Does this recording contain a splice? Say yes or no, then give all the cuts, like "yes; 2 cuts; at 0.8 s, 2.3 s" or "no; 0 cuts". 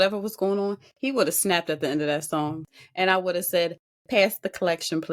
yes; 1 cut; at 2.7 s